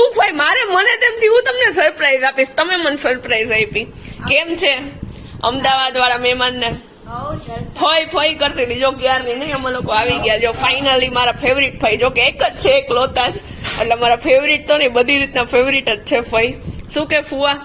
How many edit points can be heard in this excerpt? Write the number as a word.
zero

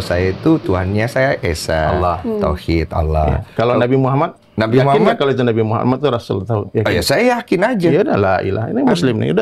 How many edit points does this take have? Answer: one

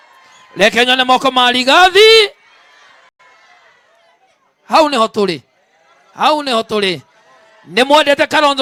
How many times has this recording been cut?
zero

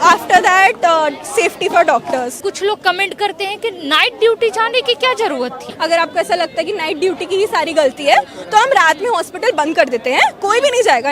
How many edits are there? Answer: two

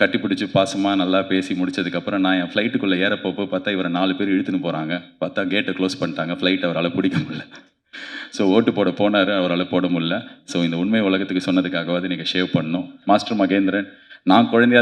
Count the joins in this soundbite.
one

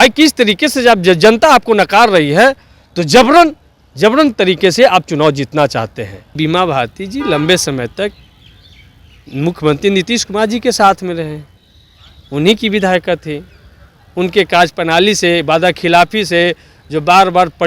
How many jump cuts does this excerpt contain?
one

